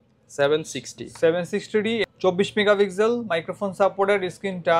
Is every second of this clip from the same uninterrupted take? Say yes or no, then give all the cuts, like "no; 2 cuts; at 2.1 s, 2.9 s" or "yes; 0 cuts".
no; 1 cut; at 2.0 s